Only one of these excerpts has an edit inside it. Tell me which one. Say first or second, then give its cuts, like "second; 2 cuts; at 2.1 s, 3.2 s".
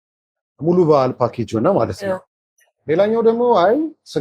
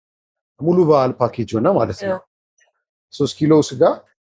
second; 1 cut; at 2.7 s